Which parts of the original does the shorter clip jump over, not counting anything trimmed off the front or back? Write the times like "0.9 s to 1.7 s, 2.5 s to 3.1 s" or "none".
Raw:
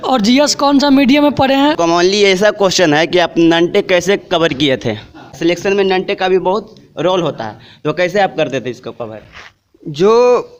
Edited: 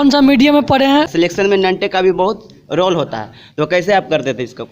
1.8 s to 5.3 s